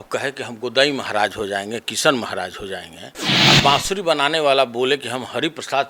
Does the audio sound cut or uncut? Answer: uncut